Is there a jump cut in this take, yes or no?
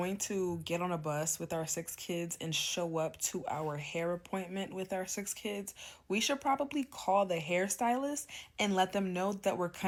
no